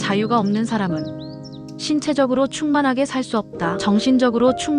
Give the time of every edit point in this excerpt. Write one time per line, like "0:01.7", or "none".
0:03.8